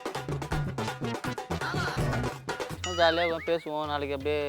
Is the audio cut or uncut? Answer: cut